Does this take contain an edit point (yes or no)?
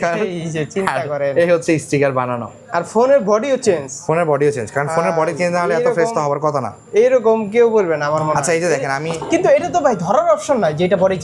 no